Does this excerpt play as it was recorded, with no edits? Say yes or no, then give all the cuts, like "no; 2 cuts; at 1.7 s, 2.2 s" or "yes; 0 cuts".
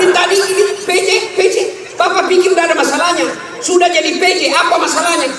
yes; 0 cuts